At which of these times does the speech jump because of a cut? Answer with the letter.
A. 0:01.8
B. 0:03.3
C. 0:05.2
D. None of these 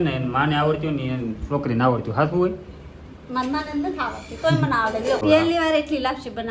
C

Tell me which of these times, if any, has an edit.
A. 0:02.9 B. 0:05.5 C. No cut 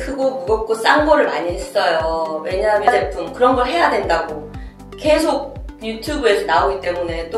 A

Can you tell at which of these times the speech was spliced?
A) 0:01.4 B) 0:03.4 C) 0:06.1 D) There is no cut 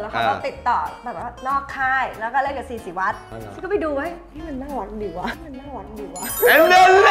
B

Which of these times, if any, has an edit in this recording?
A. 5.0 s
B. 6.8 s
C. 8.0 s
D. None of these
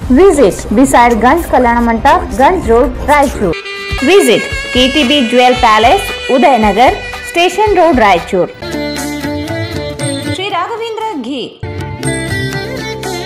D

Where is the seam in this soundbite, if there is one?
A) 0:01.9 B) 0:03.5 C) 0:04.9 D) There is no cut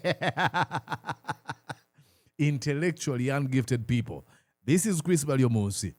D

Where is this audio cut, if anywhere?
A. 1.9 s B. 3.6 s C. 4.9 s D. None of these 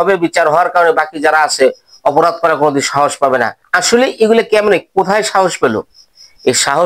B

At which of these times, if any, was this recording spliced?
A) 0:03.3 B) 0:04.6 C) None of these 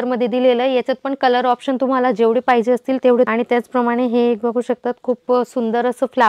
C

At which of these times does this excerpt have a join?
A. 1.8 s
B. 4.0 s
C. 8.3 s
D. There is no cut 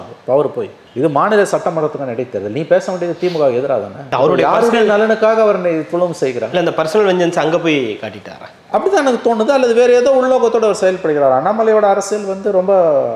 D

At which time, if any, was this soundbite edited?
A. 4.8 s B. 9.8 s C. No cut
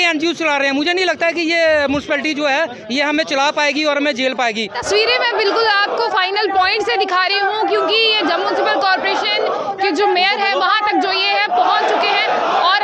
A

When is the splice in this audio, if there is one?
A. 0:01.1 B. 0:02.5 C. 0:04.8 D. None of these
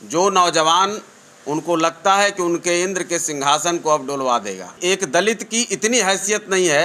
C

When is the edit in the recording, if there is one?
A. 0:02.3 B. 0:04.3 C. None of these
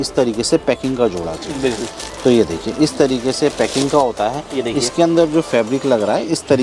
C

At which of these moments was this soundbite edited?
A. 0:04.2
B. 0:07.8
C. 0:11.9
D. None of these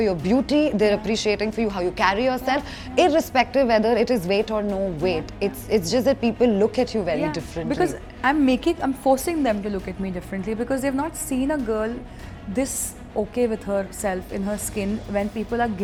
D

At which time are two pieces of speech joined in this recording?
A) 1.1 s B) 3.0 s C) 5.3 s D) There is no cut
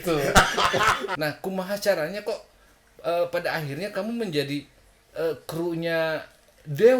A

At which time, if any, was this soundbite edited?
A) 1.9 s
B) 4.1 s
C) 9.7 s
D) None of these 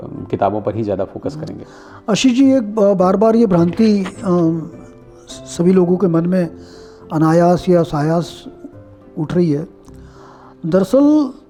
D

